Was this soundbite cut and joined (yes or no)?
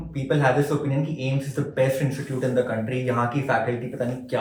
no